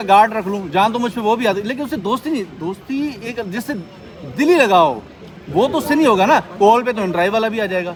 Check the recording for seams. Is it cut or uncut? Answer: uncut